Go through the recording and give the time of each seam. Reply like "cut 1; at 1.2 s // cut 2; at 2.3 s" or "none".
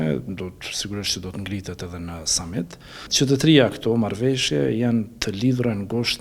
cut 1; at 3.1 s

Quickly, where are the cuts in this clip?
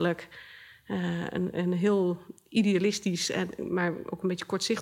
none

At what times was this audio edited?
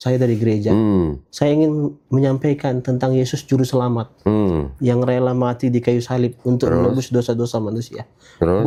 none

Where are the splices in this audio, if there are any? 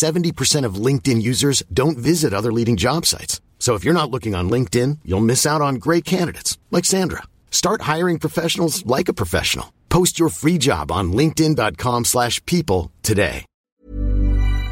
cut 1; at 13.5 s

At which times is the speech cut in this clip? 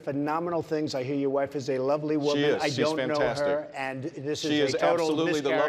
none

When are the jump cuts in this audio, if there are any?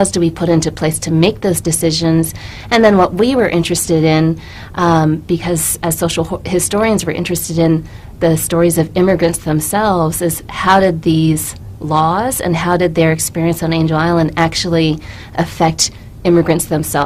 cut 1; at 8.0 s

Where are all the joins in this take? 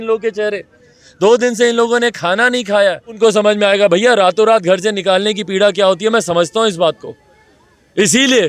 cut 1; at 3.2 s

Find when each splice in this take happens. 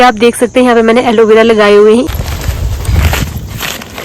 cut 1; at 2.1 s

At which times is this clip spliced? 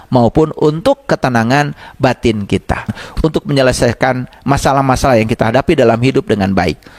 cut 1; at 3.0 s

